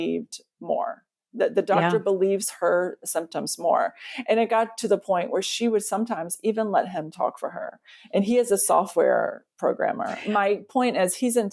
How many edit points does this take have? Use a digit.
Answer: 1